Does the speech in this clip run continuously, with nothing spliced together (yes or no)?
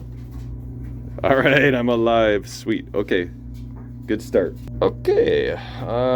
no